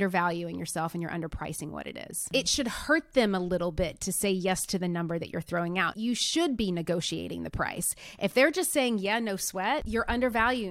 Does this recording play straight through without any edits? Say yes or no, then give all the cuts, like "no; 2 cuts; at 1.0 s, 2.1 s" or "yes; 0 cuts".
no; 2 cuts; at 5.9 s, 9.9 s